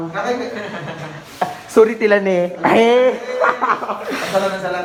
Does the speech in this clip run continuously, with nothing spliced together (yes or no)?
yes